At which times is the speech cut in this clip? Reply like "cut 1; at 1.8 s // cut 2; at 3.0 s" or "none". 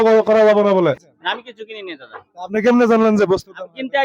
cut 1; at 1.1 s